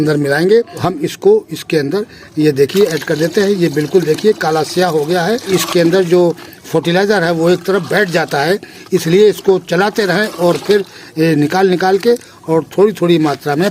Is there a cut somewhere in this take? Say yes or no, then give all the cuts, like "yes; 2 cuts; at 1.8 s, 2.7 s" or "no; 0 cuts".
yes; 2 cuts; at 0.9 s, 5.5 s